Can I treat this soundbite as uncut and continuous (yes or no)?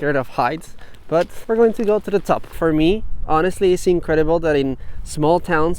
no